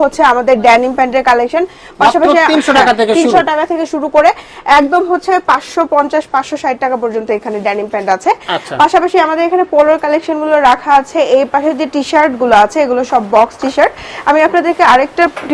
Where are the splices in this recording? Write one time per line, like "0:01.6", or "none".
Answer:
none